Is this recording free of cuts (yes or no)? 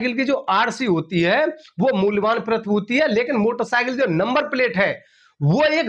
yes